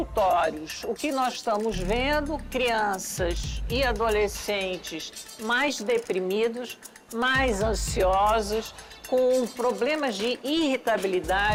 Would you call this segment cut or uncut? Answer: uncut